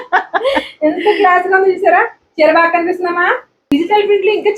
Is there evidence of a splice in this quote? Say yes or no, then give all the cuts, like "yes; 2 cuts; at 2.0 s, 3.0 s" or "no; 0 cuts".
no; 0 cuts